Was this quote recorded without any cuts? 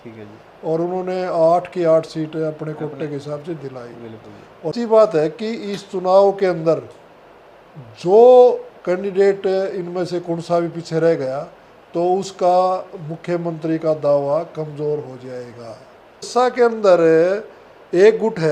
no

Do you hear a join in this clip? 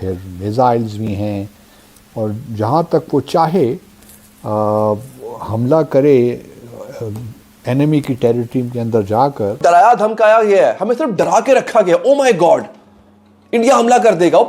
yes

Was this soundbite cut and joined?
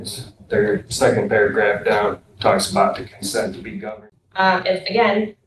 yes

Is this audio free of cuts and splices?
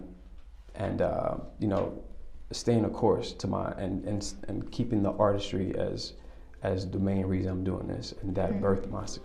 yes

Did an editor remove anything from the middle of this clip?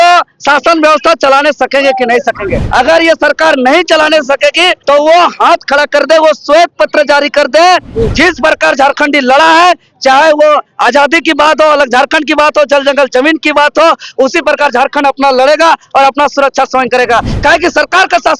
yes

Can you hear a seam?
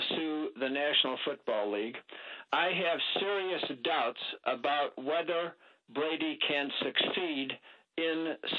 yes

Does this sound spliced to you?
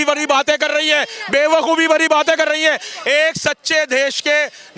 no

